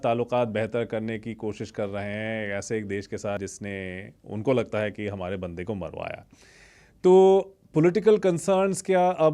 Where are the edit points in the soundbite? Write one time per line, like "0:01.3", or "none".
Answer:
none